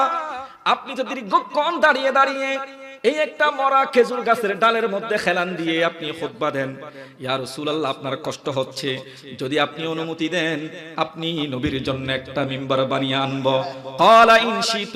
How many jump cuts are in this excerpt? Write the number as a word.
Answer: zero